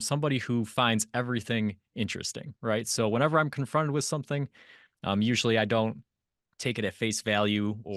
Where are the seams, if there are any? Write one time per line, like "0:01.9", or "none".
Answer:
none